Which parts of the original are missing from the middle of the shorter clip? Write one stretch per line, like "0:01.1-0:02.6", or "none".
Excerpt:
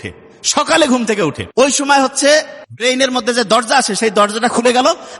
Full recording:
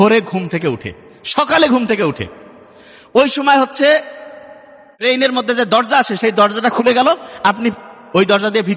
0:02.2-0:03.0
0:04.2-0:04.8